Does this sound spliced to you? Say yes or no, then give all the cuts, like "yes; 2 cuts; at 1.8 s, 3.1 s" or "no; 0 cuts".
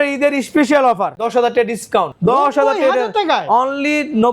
yes; 2 cuts; at 1.2 s, 2.1 s